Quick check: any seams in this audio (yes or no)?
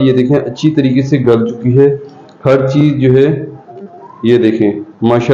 no